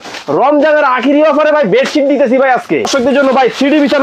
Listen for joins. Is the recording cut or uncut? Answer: cut